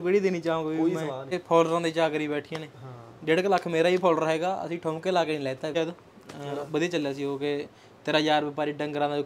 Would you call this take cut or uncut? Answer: cut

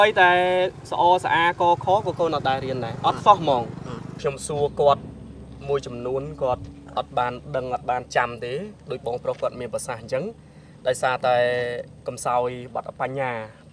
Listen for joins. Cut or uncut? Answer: cut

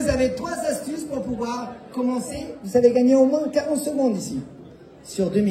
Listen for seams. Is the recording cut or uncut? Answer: cut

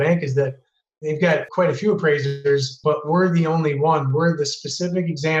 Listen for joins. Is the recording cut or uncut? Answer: cut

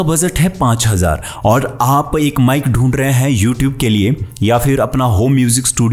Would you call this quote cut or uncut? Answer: uncut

